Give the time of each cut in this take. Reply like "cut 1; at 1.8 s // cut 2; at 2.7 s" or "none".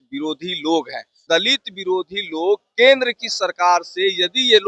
cut 1; at 1.2 s